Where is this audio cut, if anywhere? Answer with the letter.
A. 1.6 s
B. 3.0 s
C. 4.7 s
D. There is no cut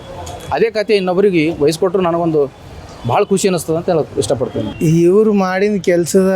C